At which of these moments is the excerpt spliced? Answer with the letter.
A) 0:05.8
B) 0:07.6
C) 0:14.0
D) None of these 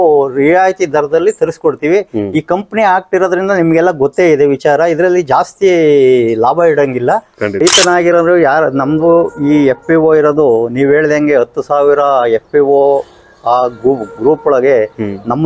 B